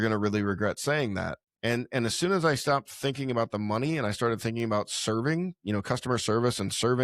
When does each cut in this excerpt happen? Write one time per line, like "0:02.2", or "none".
0:01.4